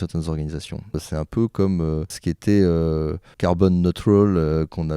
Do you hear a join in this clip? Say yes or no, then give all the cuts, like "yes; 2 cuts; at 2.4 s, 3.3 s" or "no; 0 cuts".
yes; 3 cuts; at 1.0 s, 2.2 s, 3.2 s